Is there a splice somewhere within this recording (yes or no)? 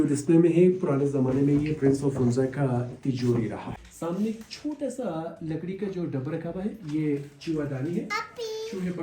yes